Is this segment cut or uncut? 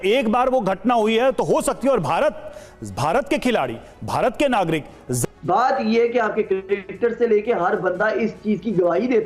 cut